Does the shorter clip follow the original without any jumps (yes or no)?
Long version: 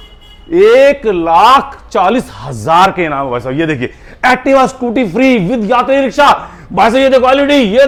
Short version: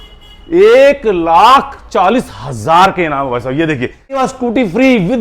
no